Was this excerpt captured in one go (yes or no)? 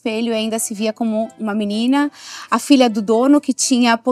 yes